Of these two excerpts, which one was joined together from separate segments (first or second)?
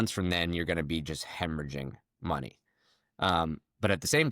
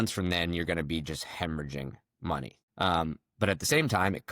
second